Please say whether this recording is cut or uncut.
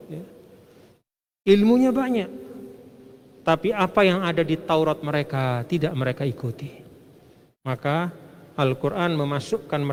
uncut